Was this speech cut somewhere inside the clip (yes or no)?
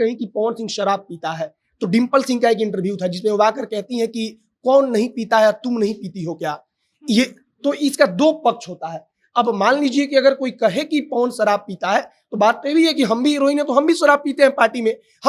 no